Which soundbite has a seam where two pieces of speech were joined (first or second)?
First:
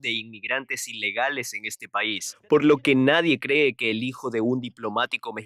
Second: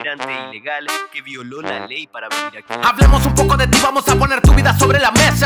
second